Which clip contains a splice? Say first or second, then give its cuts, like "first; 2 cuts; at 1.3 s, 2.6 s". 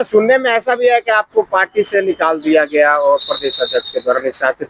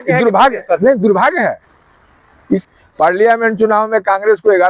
second; 1 cut; at 2.6 s